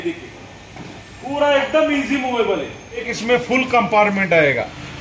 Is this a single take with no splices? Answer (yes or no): no